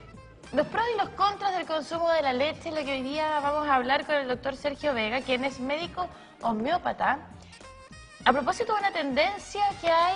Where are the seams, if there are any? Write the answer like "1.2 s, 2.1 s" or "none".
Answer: 3.2 s